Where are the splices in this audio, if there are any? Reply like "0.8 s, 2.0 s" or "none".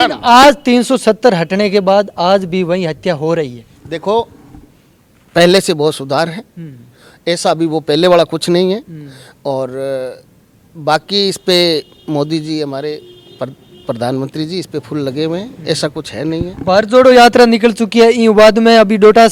none